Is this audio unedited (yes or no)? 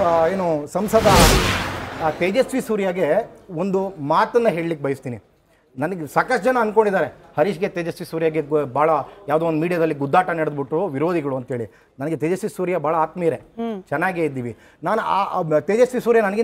yes